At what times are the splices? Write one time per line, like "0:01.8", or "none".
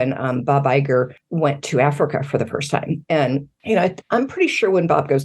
0:01.2
0:03.5

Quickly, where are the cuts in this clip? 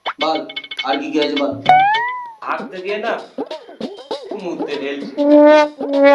0:02.4

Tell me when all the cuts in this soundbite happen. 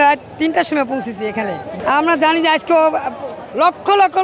0:01.7

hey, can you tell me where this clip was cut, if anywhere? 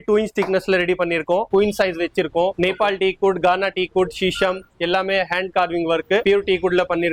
0:01.5
0:02.5
0:06.2

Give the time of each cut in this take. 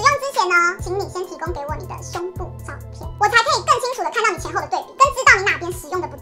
none

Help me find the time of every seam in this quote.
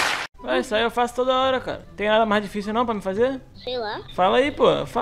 0:01.9

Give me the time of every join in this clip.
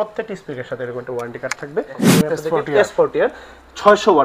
0:02.0

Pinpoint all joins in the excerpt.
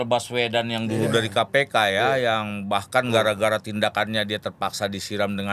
none

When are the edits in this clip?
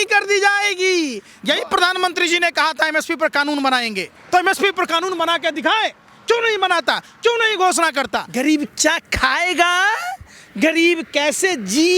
0:01.3
0:08.2

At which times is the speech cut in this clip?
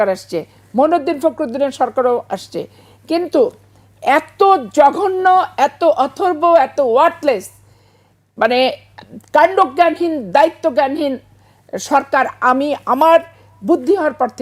none

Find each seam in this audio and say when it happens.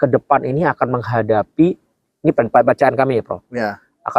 none

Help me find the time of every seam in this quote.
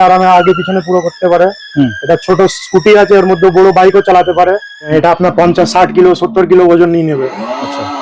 0:04.9

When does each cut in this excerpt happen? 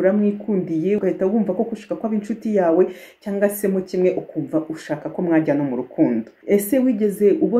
0:01.0
0:06.3

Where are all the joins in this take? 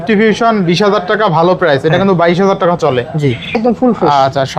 0:03.6

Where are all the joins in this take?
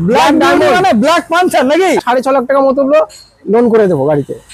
0:02.1

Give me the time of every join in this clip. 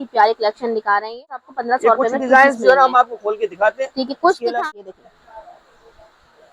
0:01.5
0:04.5

